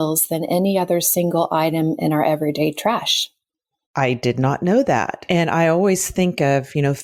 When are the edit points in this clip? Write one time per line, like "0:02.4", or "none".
none